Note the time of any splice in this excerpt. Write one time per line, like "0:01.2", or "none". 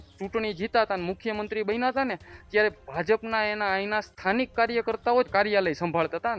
0:05.3